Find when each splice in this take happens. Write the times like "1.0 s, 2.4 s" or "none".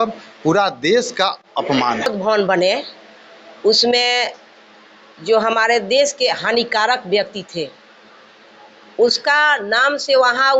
2.1 s